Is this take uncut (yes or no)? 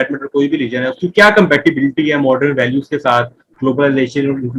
yes